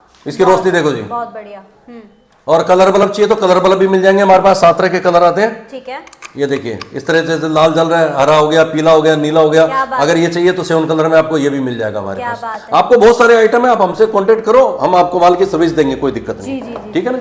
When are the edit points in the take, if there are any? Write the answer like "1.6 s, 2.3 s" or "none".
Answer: none